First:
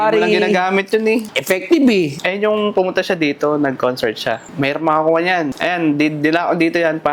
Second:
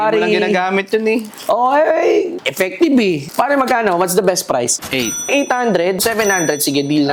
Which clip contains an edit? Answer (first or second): first